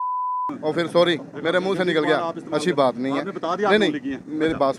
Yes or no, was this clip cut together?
no